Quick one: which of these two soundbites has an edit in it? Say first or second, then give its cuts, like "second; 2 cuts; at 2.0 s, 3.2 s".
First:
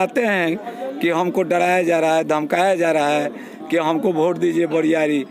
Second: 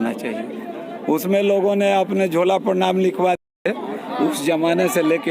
second; 1 cut; at 3.4 s